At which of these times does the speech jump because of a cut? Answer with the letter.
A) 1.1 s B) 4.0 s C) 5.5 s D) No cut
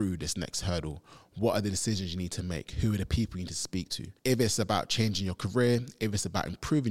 B